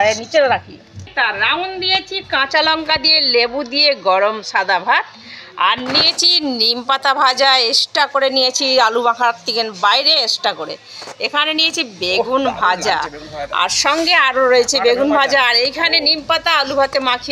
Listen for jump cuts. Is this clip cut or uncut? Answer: cut